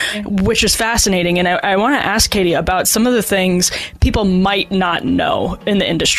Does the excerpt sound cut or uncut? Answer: uncut